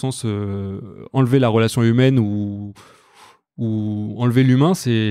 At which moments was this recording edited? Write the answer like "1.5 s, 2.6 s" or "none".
none